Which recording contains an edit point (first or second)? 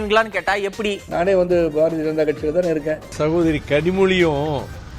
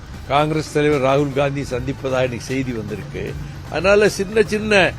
first